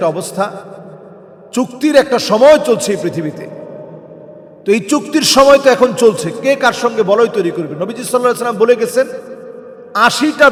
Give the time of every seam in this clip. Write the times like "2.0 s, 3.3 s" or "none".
none